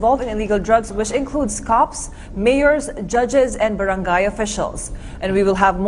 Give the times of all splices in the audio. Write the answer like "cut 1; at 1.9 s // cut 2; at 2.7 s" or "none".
cut 1; at 3.3 s